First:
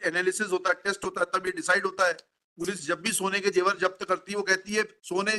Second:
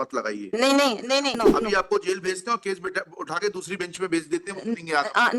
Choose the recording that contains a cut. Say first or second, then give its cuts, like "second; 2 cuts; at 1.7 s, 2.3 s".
second; 1 cut; at 1.4 s